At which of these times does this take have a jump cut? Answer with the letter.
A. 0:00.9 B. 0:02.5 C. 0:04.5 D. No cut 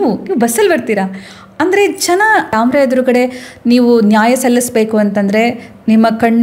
B